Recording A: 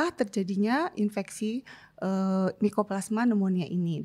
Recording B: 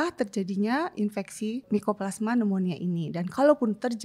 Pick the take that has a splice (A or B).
B